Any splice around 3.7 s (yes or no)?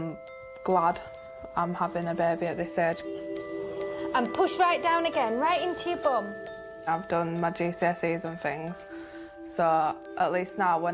no